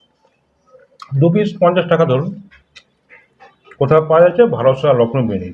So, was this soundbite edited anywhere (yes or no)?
no